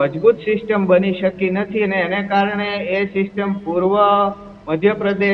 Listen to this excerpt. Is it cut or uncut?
uncut